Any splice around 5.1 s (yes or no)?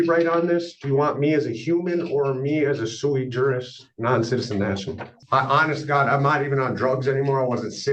yes